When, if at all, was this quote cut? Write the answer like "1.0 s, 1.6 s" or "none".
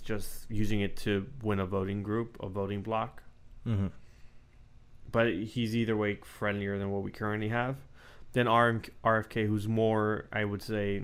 none